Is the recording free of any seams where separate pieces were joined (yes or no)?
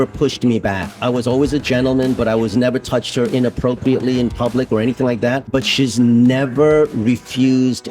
no